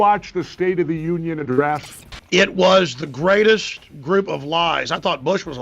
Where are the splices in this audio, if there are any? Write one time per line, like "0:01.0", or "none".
0:02.6